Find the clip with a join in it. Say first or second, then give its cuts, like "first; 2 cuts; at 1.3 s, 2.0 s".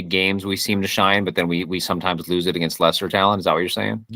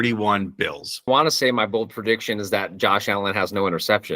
second; 1 cut; at 1.1 s